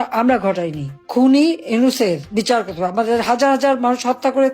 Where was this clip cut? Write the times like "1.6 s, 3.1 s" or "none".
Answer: 1.0 s